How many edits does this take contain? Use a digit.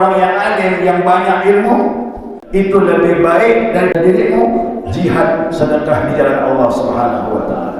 2